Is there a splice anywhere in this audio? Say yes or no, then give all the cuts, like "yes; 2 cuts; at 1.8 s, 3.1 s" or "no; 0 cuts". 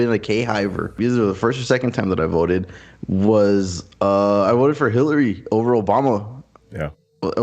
yes; 1 cut; at 0.9 s